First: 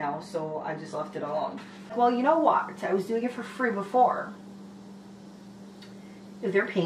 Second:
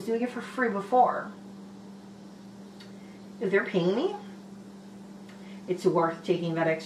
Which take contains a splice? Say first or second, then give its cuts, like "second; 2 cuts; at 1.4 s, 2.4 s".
first; 1 cut; at 1.9 s